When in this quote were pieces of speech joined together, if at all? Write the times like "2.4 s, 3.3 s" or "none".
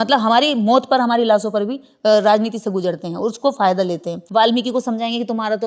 4.2 s